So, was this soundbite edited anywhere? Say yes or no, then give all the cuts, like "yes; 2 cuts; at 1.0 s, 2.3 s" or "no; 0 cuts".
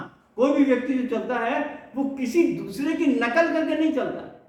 no; 0 cuts